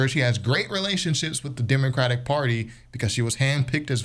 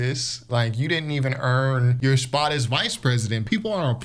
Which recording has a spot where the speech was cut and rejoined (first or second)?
second